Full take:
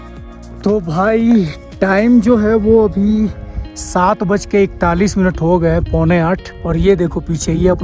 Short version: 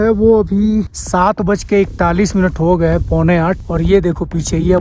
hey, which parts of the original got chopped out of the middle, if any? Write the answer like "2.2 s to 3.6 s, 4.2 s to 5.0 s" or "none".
3.4 s to 3.8 s, 6.5 s to 6.6 s